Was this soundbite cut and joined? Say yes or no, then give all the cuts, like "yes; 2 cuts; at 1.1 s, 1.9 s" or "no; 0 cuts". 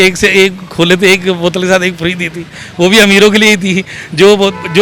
no; 0 cuts